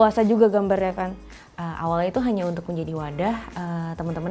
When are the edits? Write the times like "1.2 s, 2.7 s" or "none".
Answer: 1.3 s